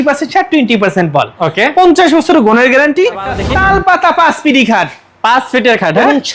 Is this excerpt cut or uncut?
cut